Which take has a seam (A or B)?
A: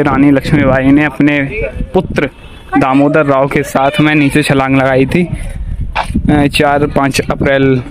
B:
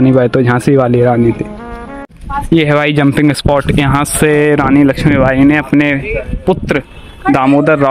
B